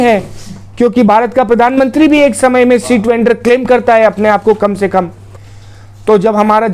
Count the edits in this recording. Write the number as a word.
one